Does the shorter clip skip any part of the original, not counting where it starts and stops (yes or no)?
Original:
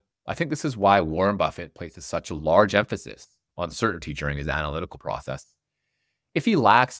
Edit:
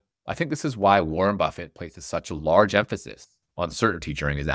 no